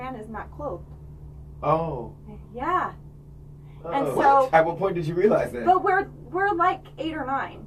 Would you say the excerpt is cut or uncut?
uncut